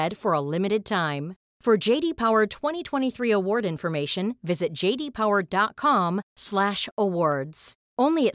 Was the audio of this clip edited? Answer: no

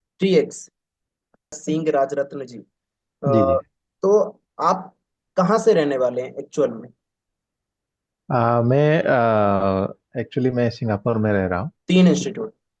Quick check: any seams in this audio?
yes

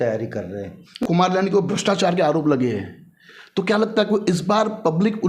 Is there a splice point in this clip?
yes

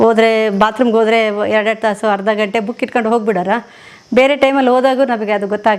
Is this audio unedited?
yes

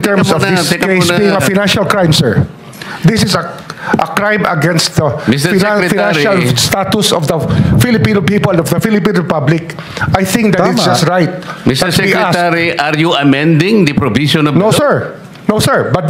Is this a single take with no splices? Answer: yes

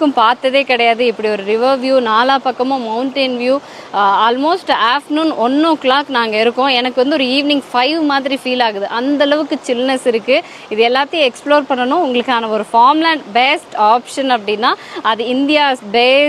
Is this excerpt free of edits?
yes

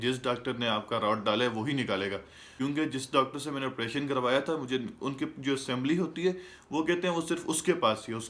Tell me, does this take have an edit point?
no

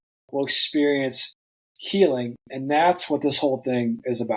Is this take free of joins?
yes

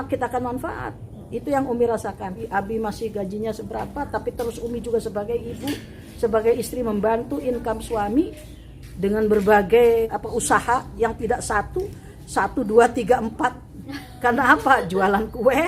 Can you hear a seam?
yes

